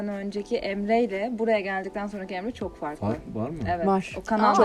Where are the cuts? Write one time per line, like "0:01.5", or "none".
none